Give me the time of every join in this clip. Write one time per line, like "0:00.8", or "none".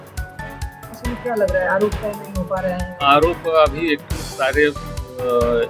0:01.0